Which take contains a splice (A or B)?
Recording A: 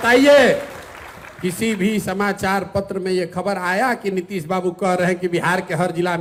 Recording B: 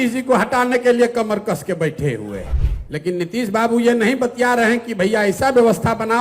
B